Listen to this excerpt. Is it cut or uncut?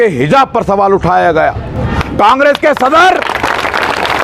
uncut